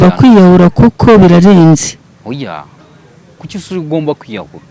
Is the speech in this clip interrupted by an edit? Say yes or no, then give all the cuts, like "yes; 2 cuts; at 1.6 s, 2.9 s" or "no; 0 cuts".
no; 0 cuts